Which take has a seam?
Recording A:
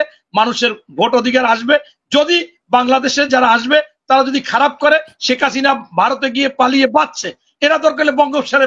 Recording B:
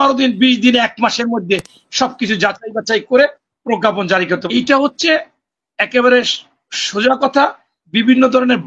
B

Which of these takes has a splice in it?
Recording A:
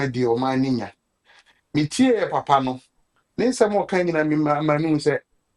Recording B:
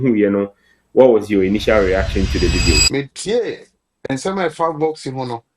B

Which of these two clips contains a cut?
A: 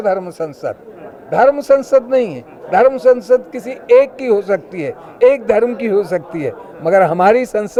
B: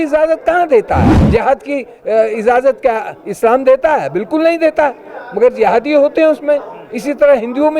B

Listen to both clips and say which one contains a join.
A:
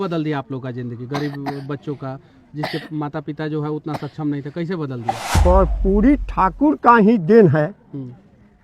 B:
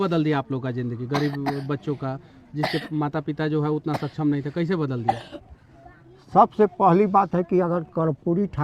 A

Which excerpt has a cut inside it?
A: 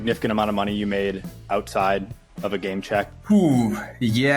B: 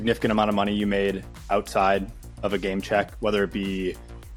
A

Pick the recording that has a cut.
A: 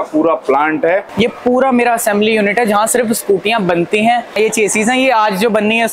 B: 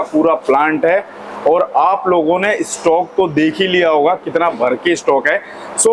A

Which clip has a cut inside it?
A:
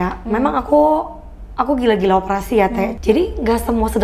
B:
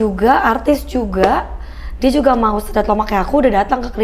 A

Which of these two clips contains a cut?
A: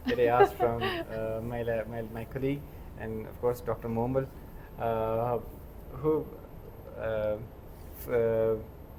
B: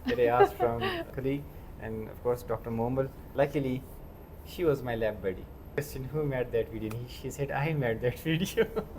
B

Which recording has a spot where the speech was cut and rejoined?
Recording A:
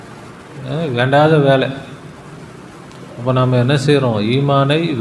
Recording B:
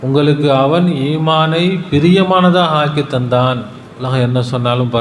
B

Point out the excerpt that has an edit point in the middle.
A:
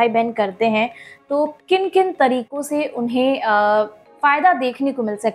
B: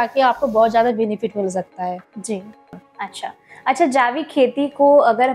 B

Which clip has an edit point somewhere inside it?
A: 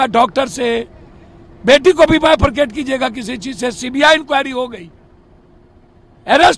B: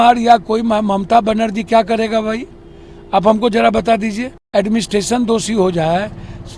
B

